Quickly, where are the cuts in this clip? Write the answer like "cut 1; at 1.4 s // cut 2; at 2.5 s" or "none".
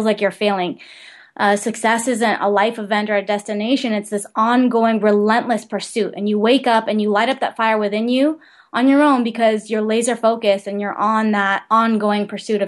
cut 1; at 11.6 s